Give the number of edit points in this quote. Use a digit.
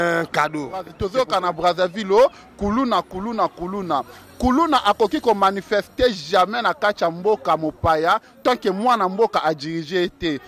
1